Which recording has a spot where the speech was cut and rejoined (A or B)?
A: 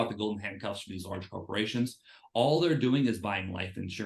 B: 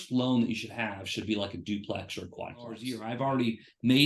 B